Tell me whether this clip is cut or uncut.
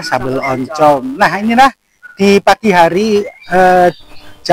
uncut